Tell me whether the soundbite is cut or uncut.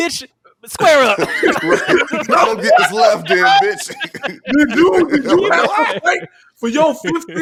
uncut